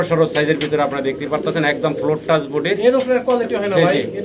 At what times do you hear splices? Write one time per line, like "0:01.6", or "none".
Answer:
none